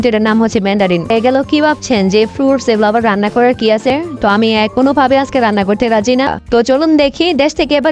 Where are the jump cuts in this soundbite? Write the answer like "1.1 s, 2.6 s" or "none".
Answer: 1.1 s, 3.9 s, 6.3 s